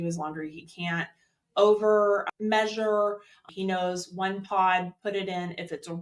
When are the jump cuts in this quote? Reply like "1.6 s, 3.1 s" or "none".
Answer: 2.3 s, 3.4 s